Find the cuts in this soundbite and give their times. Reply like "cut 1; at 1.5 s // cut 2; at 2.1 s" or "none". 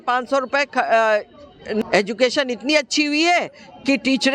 cut 1; at 1.8 s